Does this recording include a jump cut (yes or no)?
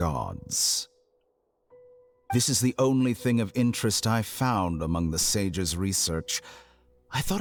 no